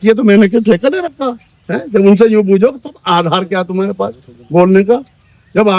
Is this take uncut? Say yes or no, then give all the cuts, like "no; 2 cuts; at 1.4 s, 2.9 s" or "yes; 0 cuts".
yes; 0 cuts